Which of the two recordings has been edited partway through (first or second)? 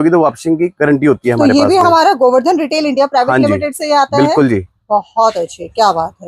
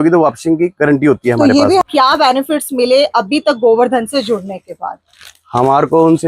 second